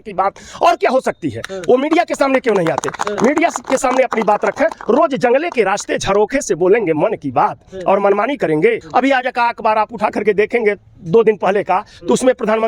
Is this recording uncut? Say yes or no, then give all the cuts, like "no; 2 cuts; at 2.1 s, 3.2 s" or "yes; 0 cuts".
no; 1 cut; at 8.8 s